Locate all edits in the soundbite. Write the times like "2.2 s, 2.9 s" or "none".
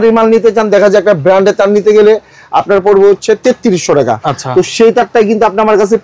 none